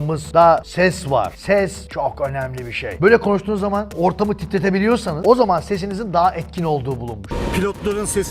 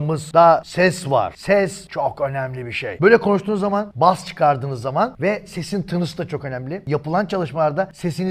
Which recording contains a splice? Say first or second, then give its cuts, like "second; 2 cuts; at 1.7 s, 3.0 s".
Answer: first; 3 cuts; at 3.9 s, 5.2 s, 7.3 s